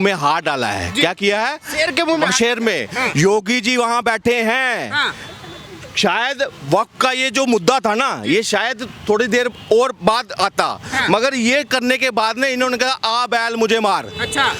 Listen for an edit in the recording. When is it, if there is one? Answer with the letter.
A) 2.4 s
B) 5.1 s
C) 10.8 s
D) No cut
D